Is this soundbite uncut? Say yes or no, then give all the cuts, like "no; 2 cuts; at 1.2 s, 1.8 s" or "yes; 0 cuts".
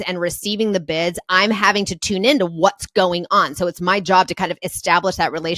yes; 0 cuts